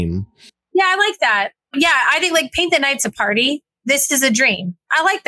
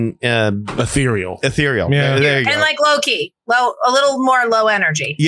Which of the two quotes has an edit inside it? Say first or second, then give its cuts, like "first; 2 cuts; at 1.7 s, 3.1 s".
first; 2 cuts; at 0.7 s, 1.7 s